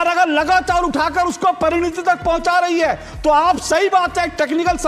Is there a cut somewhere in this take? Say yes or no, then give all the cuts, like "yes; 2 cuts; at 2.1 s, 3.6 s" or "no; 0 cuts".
no; 0 cuts